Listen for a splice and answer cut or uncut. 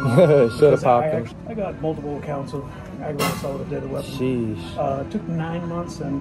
cut